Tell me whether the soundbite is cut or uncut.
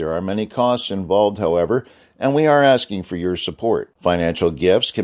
uncut